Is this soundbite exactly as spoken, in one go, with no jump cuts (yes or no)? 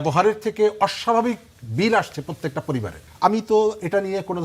no